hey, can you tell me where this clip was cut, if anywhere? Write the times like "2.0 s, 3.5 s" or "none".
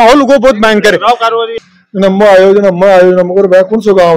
1.5 s